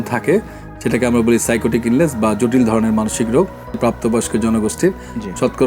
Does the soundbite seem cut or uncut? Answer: cut